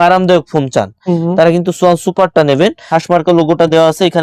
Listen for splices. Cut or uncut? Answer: cut